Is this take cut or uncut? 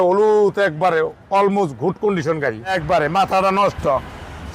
cut